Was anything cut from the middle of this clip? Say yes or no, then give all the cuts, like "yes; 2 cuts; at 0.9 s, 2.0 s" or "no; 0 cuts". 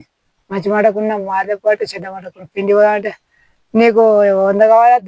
no; 0 cuts